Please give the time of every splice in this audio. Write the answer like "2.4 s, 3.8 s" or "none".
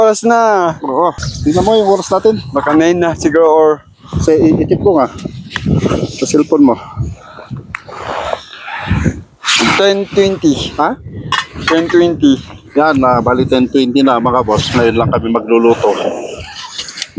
1.2 s